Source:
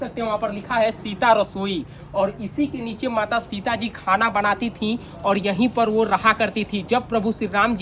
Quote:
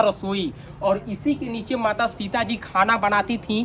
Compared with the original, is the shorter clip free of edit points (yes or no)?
yes